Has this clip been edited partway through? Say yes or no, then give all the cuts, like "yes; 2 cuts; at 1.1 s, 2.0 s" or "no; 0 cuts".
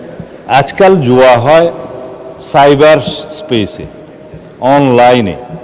no; 0 cuts